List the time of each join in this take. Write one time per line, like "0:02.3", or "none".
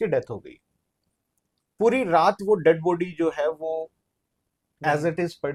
none